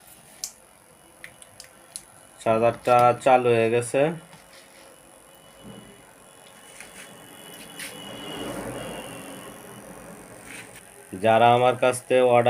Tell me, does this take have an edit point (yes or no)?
yes